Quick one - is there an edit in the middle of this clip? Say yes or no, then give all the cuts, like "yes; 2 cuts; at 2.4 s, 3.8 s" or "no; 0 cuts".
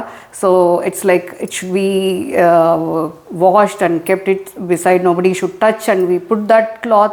no; 0 cuts